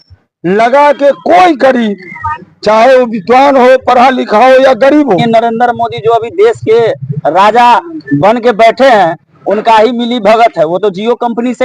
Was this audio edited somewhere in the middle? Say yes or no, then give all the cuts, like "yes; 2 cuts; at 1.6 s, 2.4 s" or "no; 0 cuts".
yes; 1 cut; at 5.2 s